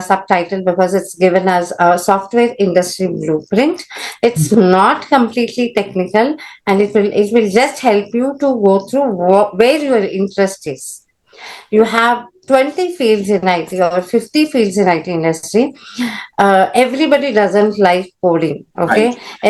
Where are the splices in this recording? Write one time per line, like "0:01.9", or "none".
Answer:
none